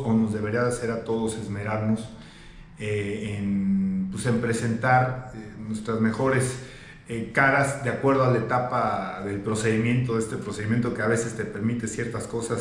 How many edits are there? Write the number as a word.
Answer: zero